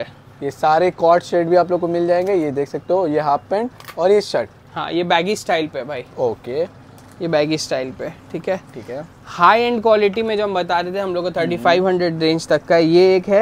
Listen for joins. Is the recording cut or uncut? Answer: uncut